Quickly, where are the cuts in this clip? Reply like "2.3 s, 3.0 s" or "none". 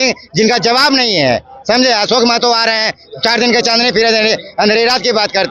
none